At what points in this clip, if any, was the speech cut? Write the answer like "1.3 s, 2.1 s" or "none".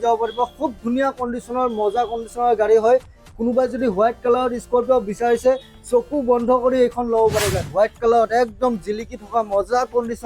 7.6 s